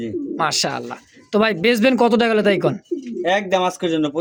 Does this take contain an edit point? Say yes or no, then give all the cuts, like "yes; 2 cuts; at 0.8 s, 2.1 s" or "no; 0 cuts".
no; 0 cuts